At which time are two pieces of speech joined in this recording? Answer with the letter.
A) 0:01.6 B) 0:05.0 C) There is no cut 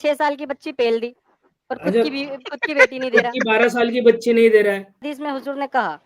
B